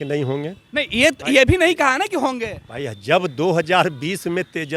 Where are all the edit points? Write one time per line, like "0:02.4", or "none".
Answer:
none